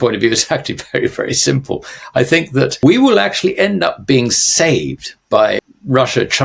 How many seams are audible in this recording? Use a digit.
2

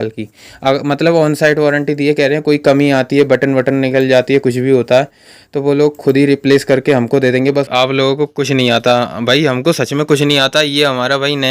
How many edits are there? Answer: 1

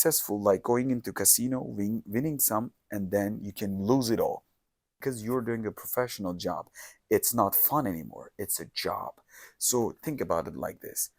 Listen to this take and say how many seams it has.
1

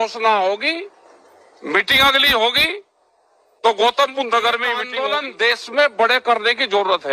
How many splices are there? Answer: 1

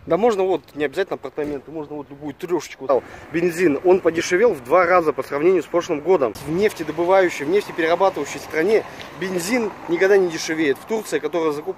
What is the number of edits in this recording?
2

